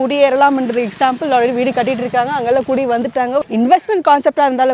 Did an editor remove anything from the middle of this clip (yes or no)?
no